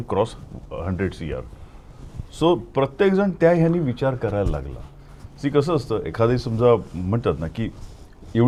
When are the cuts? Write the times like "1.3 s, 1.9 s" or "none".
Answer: none